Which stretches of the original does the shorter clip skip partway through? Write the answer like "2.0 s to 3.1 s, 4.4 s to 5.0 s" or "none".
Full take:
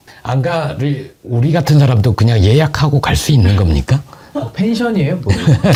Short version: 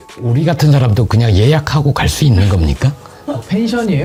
none